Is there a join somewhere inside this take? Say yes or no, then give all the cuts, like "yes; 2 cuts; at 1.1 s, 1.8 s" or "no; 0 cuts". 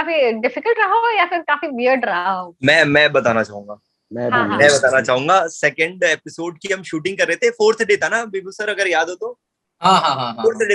no; 0 cuts